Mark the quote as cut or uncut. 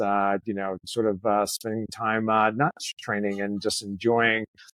uncut